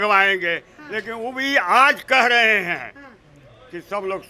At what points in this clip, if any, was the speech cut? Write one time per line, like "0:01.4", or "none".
none